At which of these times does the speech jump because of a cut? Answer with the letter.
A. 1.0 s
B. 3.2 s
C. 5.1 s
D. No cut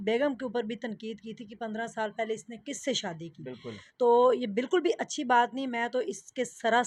D